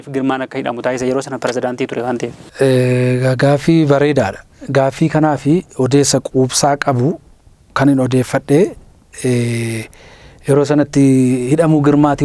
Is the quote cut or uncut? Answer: uncut